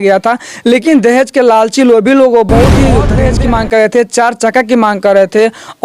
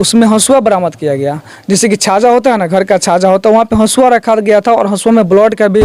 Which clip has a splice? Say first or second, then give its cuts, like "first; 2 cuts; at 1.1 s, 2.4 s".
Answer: first; 1 cut; at 3.1 s